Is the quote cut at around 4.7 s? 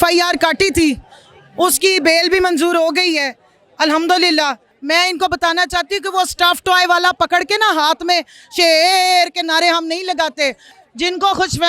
yes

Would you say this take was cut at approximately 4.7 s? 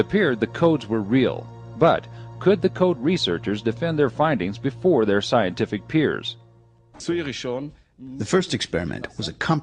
yes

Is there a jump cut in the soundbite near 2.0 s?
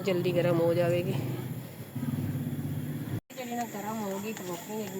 no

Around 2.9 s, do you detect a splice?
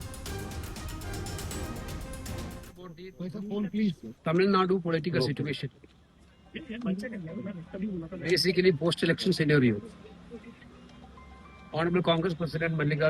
yes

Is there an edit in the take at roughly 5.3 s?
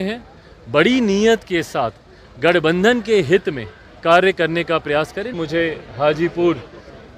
yes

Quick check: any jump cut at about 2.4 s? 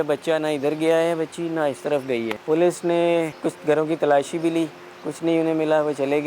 yes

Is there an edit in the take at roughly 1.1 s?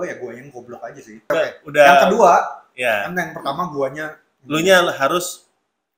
yes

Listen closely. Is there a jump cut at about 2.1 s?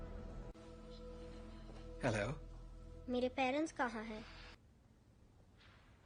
no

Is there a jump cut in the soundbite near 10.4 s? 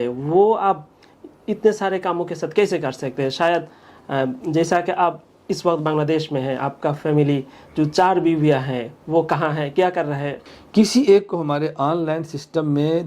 yes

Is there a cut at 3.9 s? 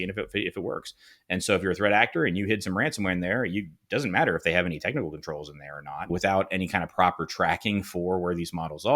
no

